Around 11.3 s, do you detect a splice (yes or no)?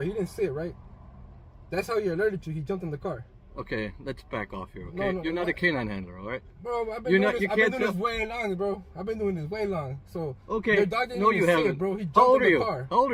no